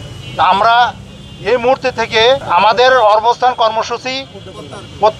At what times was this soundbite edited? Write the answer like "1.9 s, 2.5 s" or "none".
2.4 s